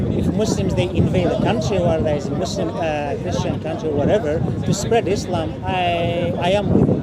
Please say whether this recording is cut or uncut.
uncut